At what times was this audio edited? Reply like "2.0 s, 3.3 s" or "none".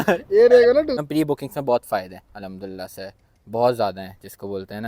1.0 s

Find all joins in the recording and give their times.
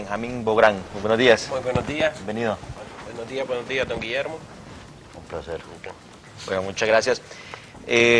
1.5 s

